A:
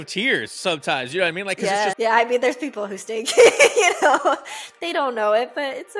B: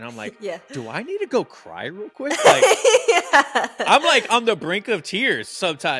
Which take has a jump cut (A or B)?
A